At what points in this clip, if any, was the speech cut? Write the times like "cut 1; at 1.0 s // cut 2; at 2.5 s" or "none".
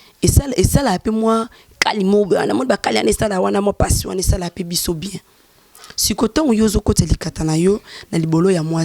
none